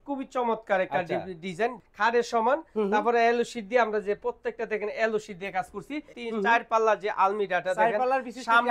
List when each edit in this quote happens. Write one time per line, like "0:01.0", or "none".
0:01.8
0:06.2